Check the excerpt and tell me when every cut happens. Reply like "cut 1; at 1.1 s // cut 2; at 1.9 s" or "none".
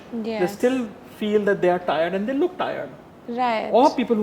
none